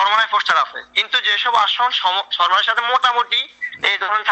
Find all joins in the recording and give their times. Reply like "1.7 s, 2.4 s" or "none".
none